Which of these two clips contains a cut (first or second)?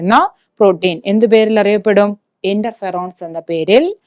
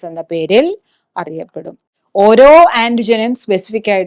second